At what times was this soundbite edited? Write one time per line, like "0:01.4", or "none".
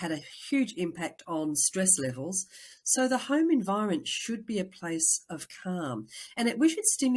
none